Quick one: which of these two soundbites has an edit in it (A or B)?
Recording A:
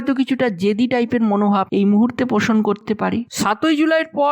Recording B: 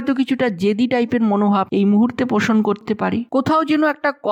A